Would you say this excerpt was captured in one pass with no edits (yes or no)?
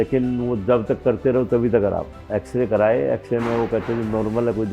no